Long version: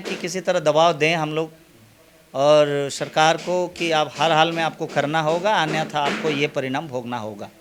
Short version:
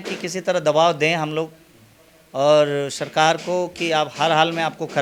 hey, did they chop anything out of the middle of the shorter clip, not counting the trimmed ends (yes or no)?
no